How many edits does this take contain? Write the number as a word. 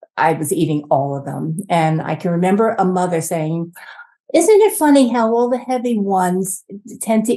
zero